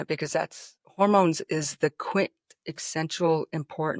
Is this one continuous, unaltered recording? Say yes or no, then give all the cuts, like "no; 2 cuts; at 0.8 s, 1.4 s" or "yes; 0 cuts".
yes; 0 cuts